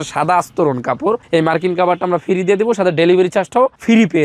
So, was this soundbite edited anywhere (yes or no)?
no